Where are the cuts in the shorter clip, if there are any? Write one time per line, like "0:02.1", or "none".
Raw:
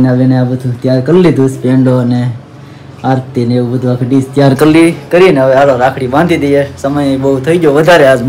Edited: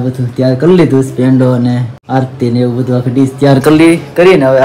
0:01.9